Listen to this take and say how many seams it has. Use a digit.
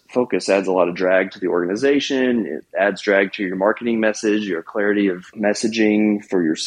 1